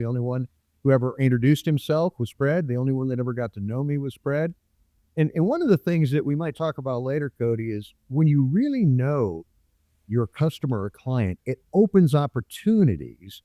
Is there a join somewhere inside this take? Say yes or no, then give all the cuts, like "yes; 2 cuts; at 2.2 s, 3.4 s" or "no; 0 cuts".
no; 0 cuts